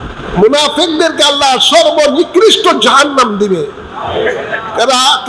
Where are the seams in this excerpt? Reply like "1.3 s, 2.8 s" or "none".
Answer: none